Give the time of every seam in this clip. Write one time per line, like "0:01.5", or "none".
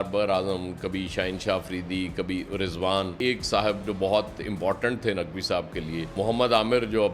0:03.1
0:06.1